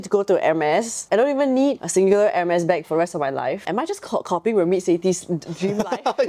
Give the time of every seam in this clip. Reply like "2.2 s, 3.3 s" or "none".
1.0 s, 1.8 s, 3.6 s

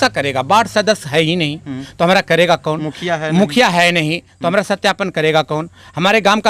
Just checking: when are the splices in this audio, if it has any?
none

